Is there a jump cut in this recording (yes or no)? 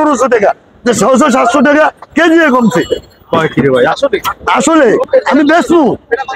no